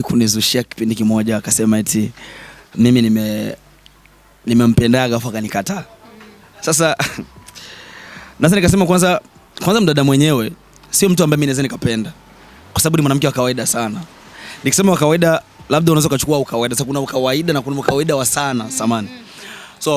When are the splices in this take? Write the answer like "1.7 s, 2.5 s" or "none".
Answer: none